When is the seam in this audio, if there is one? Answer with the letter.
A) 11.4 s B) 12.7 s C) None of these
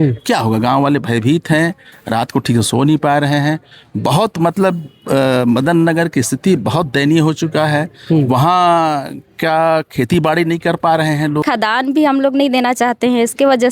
A